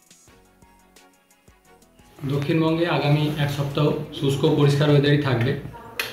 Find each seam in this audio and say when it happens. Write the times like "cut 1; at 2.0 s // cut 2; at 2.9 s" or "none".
cut 1; at 2.1 s